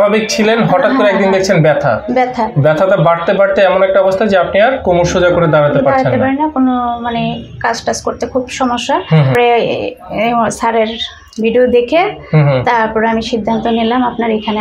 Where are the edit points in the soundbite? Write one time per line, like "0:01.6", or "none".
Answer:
0:09.3